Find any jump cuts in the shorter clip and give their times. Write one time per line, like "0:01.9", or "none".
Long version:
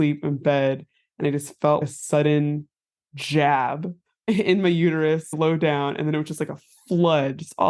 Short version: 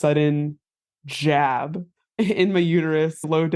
none